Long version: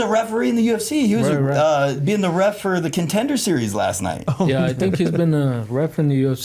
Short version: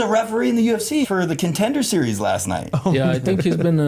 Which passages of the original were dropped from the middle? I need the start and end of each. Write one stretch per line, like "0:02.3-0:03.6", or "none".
0:01.0-0:02.6

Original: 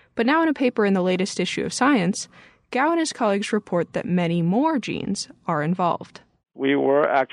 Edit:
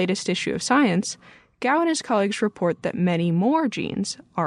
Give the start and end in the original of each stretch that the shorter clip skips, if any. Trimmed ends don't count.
none

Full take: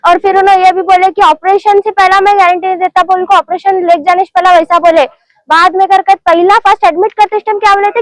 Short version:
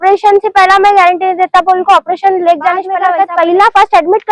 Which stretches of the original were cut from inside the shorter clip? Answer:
0:04.4-0:05.9

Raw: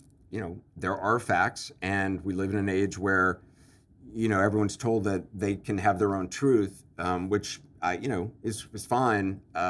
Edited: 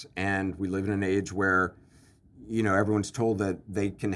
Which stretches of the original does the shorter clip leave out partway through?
none

